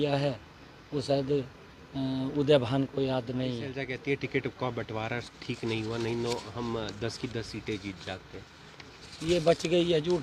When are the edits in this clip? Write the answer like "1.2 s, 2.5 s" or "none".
3.7 s